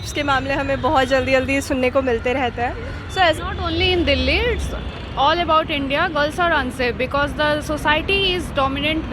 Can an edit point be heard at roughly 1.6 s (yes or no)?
no